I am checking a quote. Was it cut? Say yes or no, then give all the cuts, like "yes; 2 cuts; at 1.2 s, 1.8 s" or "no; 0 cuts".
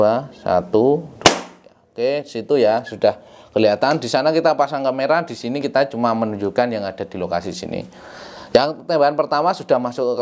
no; 0 cuts